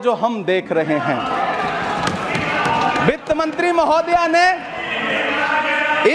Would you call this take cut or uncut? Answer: uncut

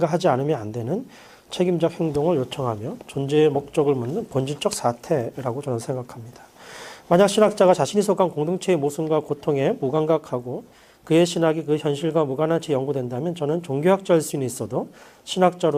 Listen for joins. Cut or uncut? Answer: cut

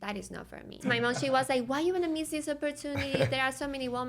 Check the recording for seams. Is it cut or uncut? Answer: cut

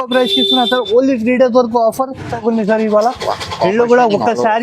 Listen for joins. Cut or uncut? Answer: cut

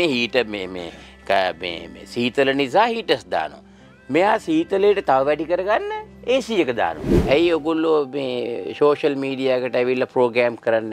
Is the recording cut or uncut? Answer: cut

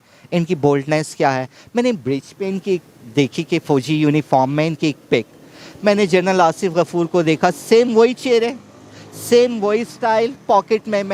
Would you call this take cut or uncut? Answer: uncut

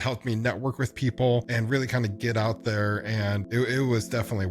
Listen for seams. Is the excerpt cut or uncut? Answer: cut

